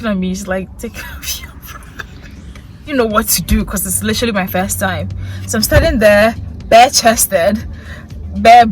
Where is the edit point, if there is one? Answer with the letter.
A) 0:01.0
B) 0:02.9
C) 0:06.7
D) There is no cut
B